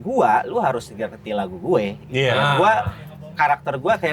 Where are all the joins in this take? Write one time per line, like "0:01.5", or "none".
none